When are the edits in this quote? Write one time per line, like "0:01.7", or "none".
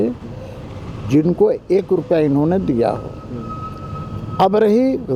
none